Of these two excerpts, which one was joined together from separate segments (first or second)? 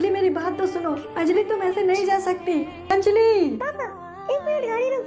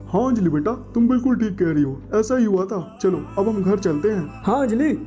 first